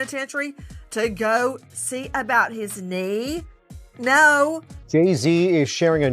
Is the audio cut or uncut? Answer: cut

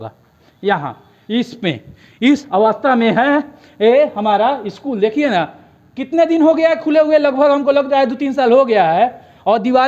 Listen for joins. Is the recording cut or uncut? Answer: uncut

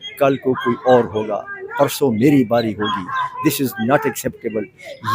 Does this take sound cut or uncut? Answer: uncut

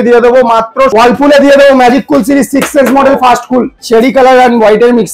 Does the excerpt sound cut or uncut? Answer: cut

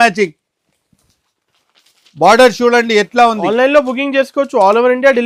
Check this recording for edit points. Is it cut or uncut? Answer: uncut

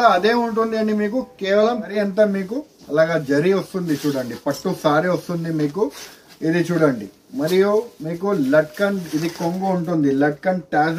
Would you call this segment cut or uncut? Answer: cut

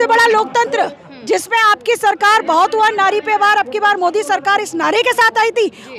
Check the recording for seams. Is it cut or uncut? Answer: uncut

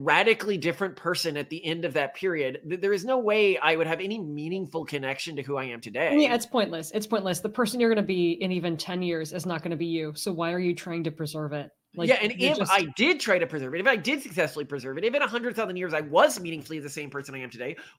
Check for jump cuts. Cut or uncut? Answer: uncut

